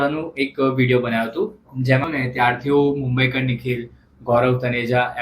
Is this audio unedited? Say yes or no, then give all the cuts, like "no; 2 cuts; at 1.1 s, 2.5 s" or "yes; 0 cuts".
no; 1 cut; at 2.0 s